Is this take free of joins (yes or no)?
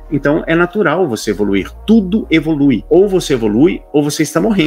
no